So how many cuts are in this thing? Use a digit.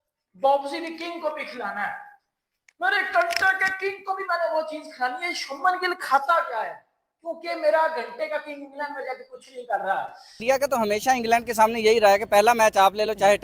1